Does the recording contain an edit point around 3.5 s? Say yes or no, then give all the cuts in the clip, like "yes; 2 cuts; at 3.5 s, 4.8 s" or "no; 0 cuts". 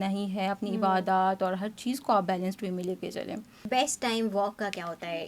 yes; 1 cut; at 3.5 s